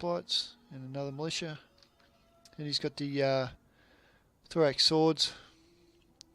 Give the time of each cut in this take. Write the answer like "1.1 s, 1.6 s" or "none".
2.9 s